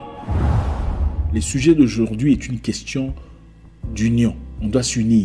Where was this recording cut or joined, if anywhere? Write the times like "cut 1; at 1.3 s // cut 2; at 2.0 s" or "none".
cut 1; at 1.2 s